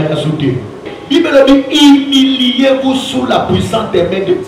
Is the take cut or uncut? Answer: cut